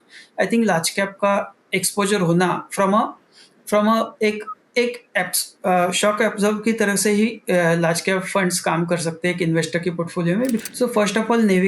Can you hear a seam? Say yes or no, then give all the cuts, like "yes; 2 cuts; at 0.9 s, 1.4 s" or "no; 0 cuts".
yes; 1 cut; at 10.6 s